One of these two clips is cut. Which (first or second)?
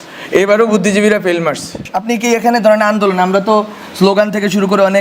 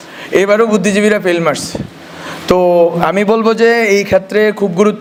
first